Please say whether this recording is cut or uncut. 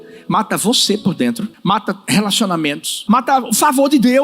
cut